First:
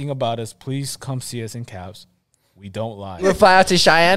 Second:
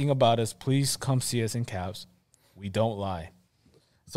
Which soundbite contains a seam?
first; 1 cut; at 3.2 s

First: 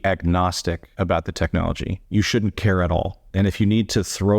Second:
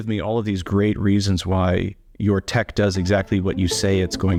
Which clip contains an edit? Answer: first; 3 cuts; at 0.9 s, 2.0 s, 3.2 s

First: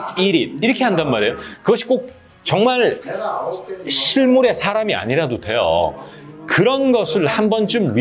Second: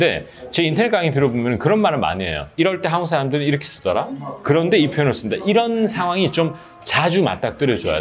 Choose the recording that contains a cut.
first; 1 cut; at 1.5 s

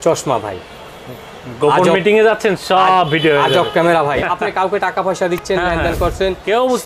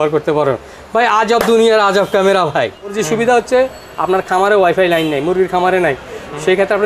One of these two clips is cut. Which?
second; 1 cut; at 3.0 s

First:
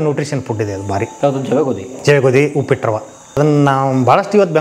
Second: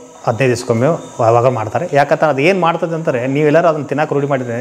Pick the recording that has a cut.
first; 2 cuts; at 1.1 s, 3.4 s

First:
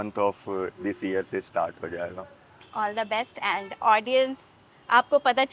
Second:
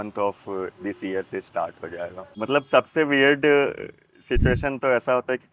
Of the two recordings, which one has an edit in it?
second; 1 cut; at 2.2 s

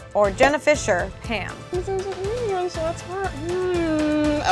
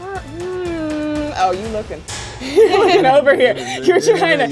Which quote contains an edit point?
first; 1 cut; at 1.7 s

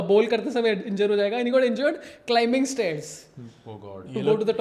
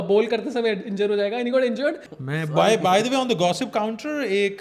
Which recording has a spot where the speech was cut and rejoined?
second; 1 cut; at 2.1 s

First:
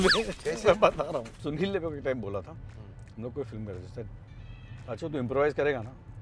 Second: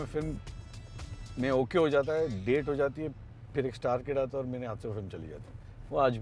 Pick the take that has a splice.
first; 1 cut; at 1.3 s

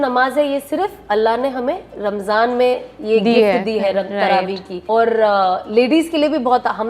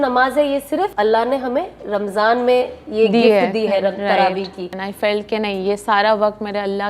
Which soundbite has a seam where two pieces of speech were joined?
second; 2 cuts; at 0.9 s, 4.6 s

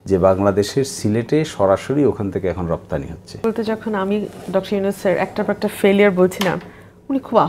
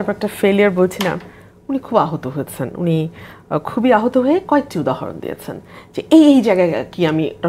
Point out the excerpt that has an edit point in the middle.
first; 1 cut; at 3.4 s

